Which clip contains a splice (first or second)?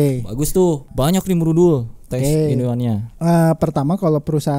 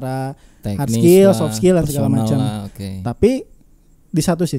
first